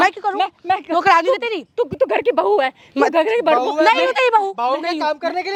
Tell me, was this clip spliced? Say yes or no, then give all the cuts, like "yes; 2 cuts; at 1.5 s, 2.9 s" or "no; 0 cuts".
no; 0 cuts